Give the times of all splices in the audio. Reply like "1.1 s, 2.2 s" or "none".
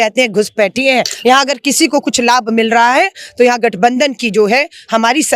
1.1 s